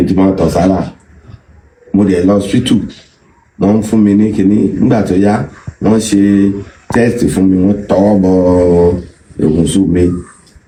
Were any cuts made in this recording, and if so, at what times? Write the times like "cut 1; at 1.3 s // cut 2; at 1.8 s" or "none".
none